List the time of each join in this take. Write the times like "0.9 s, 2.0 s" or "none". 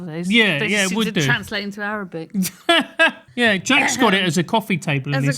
3.2 s